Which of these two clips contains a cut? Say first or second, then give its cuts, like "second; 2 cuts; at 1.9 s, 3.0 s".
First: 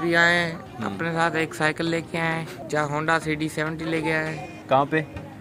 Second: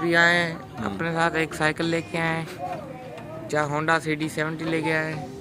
first; 2 cuts; at 2.5 s, 4.5 s